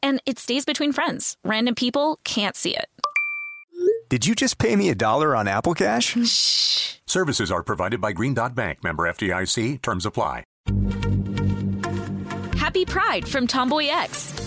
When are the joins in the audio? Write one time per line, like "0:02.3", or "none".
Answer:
0:10.5